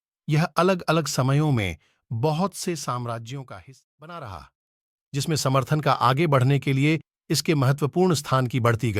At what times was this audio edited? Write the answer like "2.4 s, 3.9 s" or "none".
3.6 s